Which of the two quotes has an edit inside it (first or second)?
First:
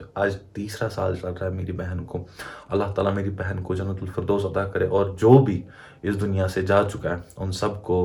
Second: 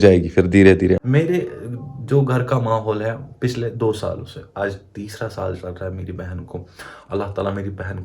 second